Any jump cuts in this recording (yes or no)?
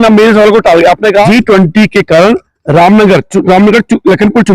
yes